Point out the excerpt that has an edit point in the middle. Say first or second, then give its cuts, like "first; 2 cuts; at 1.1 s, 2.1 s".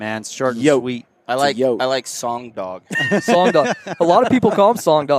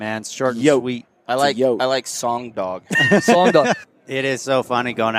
second; 1 cut; at 3.9 s